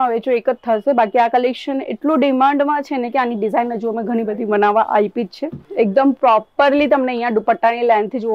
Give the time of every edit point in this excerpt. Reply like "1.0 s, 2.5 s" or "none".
5.6 s